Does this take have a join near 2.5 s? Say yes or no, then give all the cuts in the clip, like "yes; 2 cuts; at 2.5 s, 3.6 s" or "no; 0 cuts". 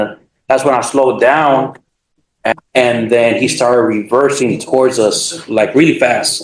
yes; 1 cut; at 2.5 s